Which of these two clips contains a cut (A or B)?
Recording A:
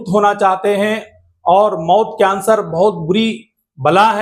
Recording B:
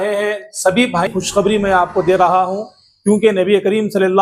B